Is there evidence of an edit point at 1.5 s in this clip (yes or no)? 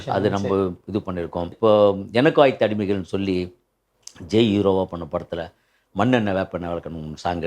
yes